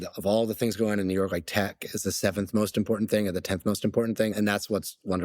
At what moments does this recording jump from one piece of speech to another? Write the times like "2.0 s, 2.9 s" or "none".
4.3 s